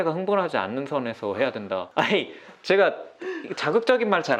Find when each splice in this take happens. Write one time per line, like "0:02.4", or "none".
0:01.9

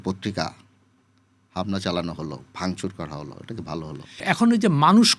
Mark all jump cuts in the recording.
0:04.2

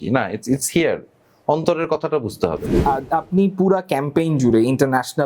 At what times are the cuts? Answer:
0:02.7

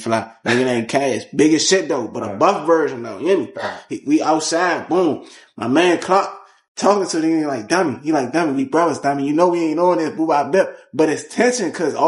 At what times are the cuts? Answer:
none

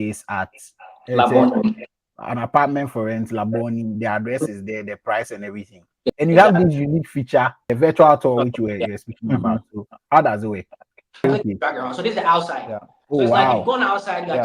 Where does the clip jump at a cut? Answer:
0:06.1
0:07.7
0:11.2

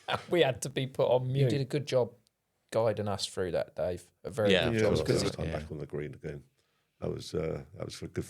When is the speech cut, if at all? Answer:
0:01.6
0:05.3

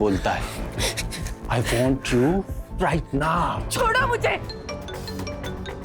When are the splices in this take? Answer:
0:04.5

